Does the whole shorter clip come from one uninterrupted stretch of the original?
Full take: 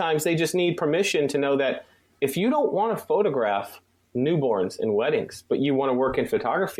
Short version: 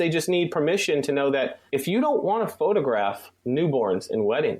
no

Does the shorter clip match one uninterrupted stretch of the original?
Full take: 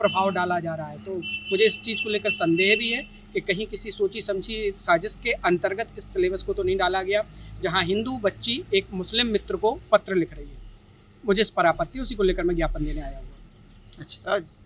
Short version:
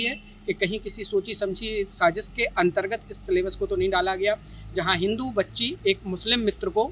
yes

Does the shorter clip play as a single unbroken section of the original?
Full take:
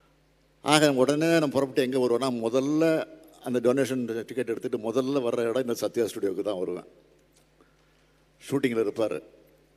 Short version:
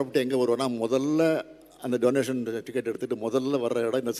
yes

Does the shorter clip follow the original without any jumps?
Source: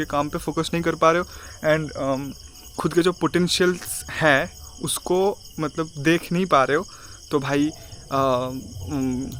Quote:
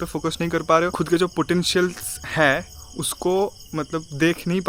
no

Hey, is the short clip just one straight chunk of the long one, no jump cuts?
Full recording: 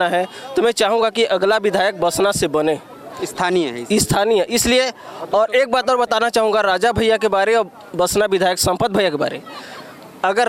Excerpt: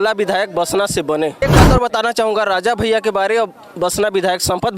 no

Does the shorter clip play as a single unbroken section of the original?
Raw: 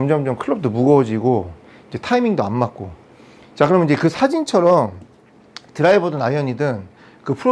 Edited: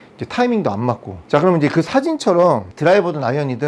no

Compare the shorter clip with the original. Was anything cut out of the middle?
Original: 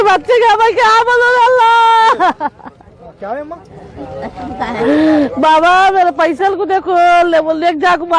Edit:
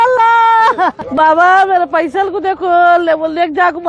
yes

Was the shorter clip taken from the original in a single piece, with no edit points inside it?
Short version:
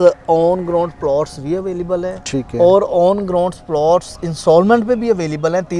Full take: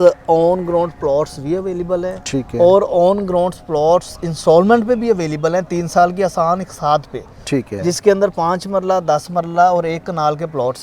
yes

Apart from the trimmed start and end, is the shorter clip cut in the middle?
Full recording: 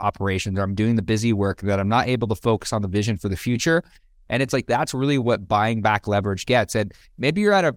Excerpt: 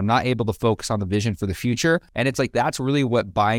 yes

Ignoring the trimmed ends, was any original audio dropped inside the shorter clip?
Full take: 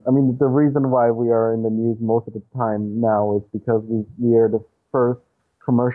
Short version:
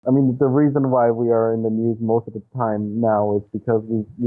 no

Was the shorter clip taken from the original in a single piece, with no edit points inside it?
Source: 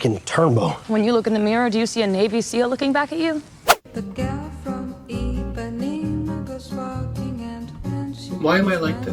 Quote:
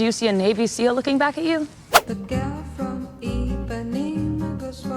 no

